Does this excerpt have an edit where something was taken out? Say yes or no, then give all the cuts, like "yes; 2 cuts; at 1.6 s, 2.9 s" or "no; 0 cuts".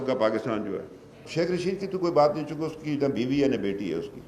no; 0 cuts